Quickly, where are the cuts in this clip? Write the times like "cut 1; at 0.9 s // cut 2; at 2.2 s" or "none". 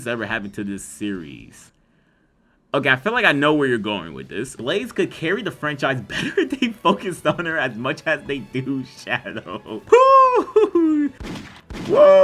cut 1; at 4.5 s // cut 2; at 9.7 s